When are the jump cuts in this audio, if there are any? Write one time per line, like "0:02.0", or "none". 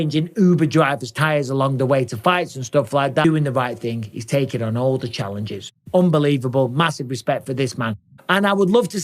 0:03.2